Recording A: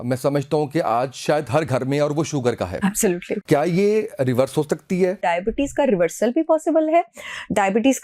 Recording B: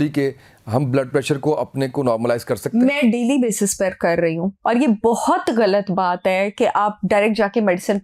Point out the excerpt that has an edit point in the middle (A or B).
A